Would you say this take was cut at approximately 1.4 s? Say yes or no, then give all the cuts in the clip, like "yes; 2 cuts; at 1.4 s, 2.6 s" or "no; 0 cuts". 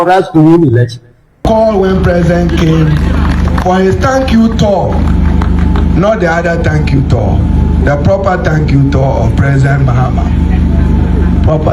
yes; 1 cut; at 1.4 s